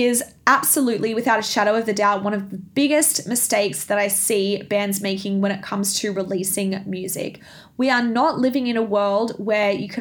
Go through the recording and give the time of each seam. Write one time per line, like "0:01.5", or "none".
none